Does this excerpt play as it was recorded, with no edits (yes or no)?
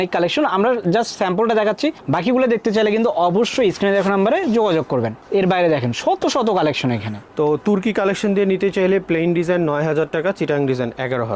yes